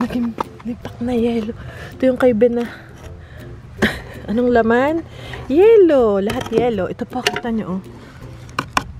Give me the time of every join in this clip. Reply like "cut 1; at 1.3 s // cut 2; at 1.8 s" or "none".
none